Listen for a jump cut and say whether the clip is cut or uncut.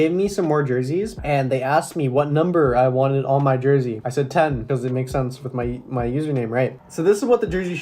cut